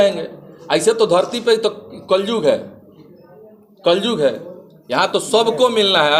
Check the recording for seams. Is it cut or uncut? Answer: uncut